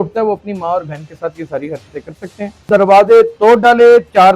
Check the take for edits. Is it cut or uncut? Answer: cut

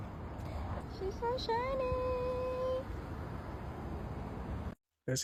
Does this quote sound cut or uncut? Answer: uncut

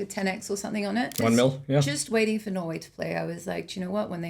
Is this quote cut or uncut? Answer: cut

